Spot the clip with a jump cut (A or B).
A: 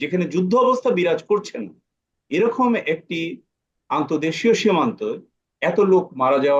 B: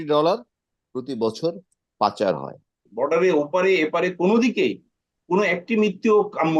B